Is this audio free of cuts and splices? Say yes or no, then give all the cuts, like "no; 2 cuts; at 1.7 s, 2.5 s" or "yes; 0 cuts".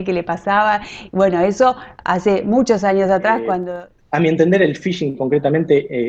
no; 1 cut; at 3.6 s